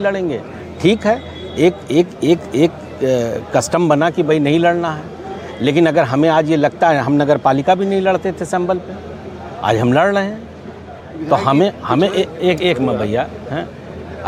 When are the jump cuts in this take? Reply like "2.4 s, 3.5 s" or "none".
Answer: none